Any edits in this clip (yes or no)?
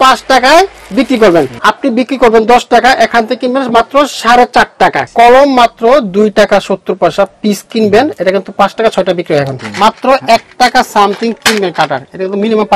yes